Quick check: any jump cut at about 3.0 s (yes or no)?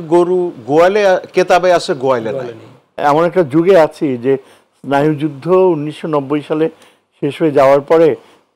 yes